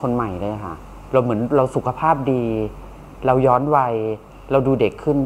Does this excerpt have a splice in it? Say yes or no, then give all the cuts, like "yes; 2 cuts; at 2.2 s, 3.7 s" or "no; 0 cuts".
no; 0 cuts